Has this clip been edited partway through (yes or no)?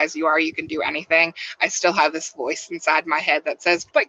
no